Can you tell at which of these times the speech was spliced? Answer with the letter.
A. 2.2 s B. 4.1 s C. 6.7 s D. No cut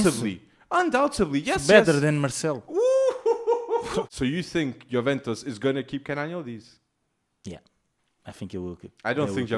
B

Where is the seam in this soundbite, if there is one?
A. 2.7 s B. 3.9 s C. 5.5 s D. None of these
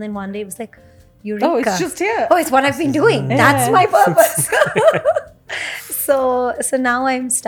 D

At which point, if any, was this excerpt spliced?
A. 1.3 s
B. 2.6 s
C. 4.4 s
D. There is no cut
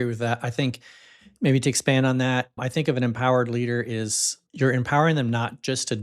C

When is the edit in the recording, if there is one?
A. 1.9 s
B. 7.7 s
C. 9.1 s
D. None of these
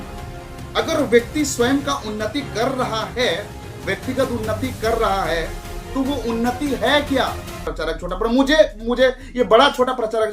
B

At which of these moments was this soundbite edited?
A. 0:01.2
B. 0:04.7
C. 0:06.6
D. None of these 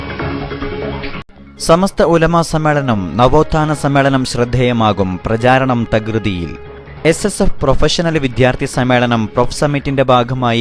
A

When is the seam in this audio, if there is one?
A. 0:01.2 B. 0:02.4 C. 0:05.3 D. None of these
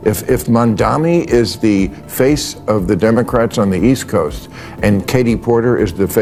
D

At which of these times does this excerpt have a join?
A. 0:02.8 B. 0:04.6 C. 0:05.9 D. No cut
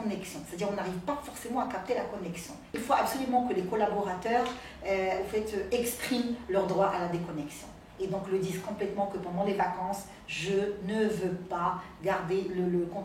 A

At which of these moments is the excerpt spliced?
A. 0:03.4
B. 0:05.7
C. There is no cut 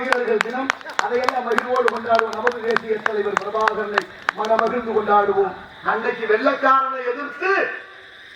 B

